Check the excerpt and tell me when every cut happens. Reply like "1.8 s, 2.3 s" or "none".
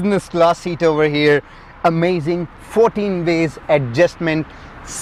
none